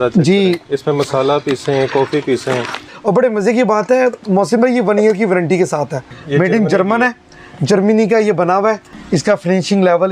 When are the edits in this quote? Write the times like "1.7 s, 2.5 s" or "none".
2.8 s, 6.1 s, 8.9 s